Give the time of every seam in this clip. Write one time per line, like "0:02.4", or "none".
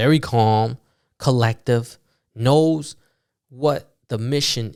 none